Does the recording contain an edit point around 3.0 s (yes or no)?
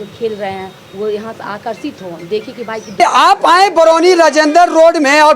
yes